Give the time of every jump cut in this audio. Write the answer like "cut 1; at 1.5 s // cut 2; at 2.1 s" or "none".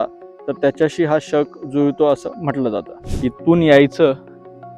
cut 1; at 3.0 s